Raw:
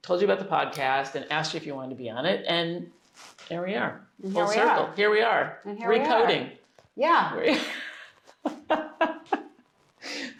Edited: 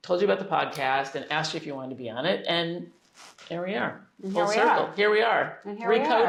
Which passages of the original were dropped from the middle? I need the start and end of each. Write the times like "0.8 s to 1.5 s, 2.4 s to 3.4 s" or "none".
none